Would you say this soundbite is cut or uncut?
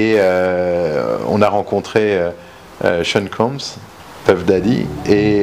uncut